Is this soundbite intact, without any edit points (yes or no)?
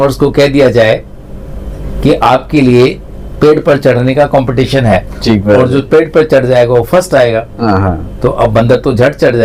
yes